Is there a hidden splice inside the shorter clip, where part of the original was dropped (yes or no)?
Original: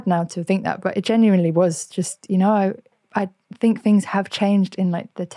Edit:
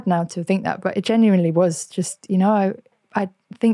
no